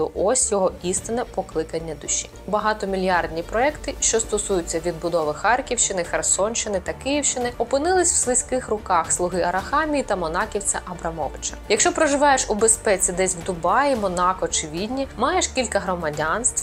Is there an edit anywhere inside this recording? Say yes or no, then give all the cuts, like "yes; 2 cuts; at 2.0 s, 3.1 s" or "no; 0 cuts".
yes; 2 cuts; at 2.5 s, 11.5 s